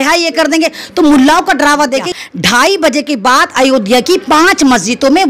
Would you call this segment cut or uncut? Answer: cut